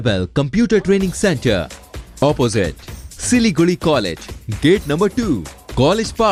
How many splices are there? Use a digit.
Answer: 0